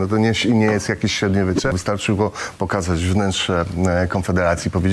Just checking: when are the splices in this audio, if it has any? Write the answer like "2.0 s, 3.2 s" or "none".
1.8 s